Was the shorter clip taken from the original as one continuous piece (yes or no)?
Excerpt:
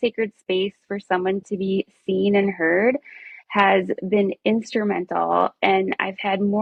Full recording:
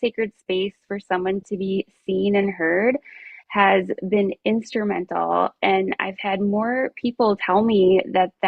yes